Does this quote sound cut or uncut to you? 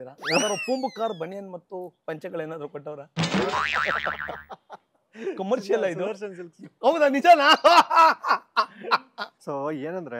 uncut